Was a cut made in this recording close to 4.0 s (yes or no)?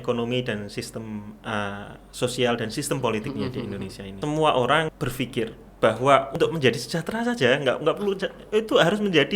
yes